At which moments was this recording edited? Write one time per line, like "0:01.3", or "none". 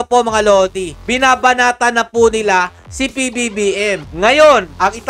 0:04.1